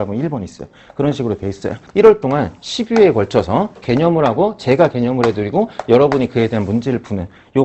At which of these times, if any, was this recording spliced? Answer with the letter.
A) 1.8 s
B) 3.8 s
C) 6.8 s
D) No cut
A